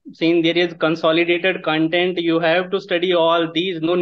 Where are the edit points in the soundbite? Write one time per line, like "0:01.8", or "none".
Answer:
none